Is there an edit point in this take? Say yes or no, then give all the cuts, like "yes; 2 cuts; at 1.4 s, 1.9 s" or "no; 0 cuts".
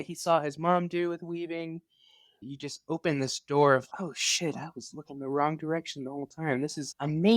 no; 0 cuts